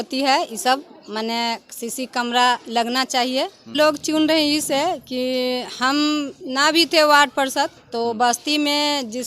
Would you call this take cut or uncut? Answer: cut